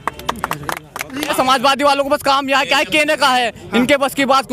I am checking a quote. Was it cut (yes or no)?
yes